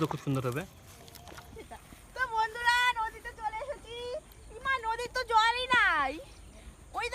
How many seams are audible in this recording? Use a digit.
1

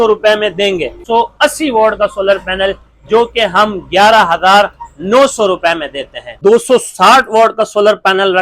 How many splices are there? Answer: 2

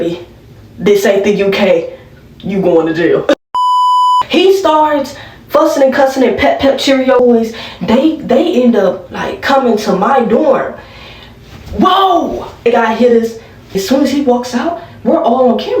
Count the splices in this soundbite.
4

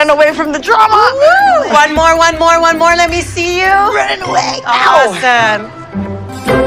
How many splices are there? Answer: 0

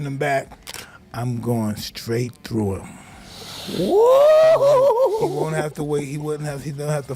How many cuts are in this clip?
1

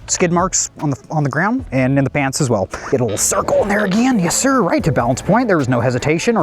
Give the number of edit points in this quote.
1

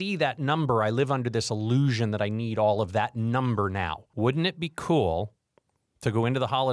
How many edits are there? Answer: 1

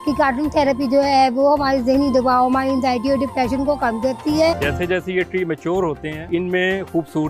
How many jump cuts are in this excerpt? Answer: 2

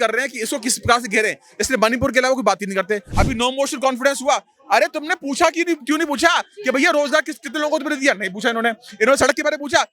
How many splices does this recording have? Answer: 1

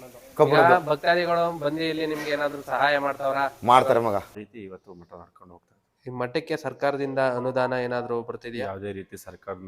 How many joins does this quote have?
1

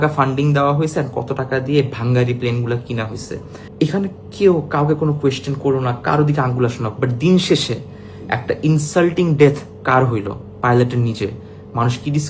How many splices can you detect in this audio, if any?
1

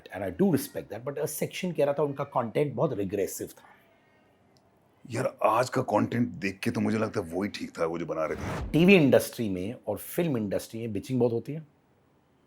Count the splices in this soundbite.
1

